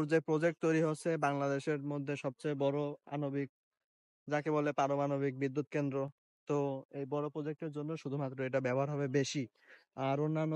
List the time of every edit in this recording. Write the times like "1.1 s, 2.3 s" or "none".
none